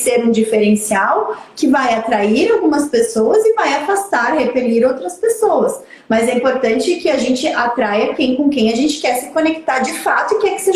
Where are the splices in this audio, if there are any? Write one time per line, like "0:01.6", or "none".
none